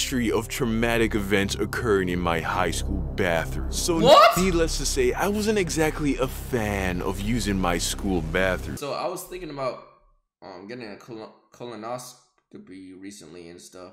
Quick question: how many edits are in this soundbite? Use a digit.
1